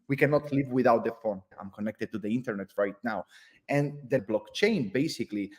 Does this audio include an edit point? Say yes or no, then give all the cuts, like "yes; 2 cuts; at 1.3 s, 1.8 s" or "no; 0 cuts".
yes; 2 cuts; at 1.5 s, 4.2 s